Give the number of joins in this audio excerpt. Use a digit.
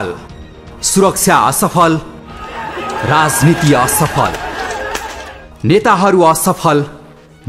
0